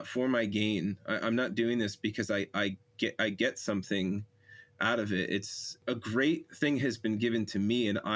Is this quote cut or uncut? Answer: cut